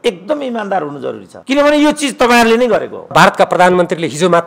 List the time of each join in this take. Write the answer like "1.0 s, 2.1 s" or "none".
1.3 s, 3.1 s